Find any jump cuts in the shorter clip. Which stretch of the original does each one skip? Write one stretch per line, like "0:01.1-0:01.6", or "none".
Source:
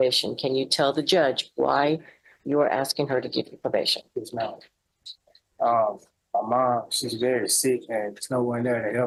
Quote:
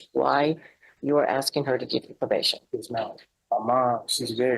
0:04.7-0:06.1